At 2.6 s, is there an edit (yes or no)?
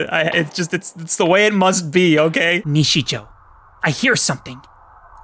yes